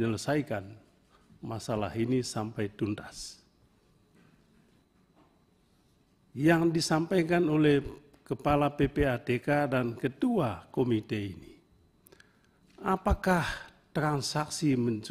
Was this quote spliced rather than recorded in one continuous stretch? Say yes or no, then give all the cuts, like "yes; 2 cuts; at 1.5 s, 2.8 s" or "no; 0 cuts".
yes; 1 cut; at 4.8 s